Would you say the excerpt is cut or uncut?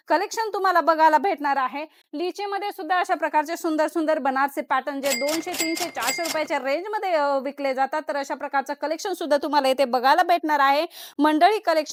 uncut